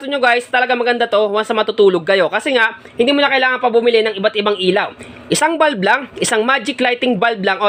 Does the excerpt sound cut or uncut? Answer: uncut